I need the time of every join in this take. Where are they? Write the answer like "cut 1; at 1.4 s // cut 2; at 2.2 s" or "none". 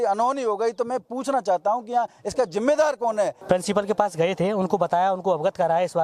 cut 1; at 3.4 s